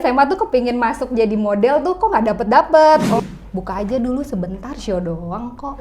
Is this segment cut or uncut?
cut